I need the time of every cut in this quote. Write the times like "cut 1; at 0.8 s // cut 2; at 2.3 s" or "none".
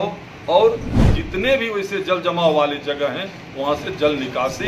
none

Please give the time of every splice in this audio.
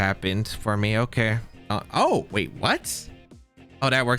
cut 1; at 1.6 s

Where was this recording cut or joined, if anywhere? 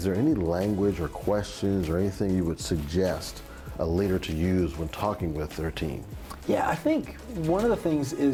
none

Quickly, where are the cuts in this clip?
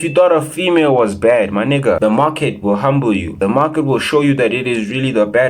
none

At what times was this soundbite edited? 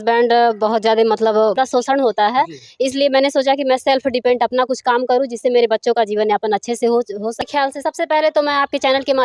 cut 1; at 1.6 s // cut 2; at 7.4 s

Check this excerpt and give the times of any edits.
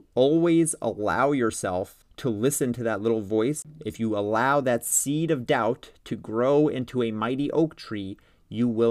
cut 1; at 2.0 s // cut 2; at 3.7 s

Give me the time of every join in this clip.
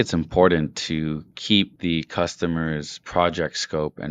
cut 1; at 1.7 s // cut 2; at 2.9 s

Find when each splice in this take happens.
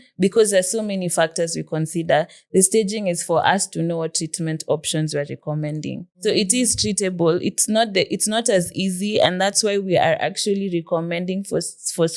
cut 1; at 6.1 s

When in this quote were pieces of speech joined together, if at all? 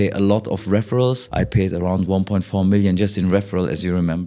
cut 1; at 1.2 s

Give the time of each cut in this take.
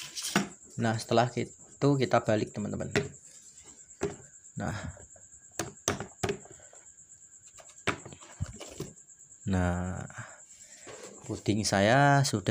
none

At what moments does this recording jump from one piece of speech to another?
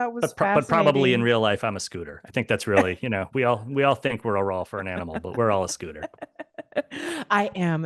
none

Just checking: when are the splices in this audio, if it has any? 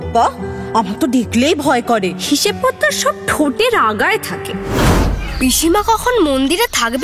cut 1; at 4.9 s

